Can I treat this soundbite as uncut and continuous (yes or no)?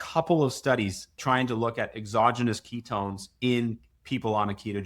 no